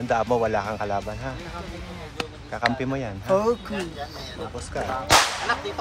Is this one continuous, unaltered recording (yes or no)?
yes